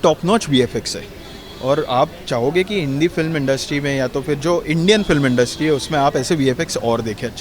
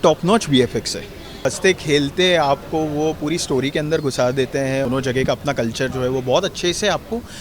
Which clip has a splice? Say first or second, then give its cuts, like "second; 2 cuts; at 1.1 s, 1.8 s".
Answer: second; 2 cuts; at 1.5 s, 4.9 s